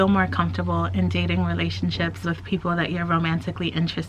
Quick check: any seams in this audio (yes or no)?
yes